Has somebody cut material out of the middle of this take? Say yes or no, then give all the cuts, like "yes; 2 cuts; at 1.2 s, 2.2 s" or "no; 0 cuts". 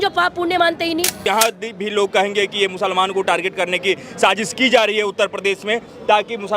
yes; 1 cut; at 1.2 s